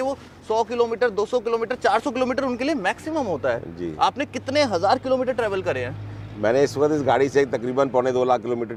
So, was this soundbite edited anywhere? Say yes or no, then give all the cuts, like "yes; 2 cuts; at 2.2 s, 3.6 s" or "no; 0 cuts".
no; 0 cuts